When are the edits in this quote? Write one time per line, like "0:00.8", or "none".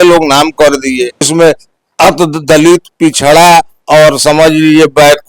0:01.3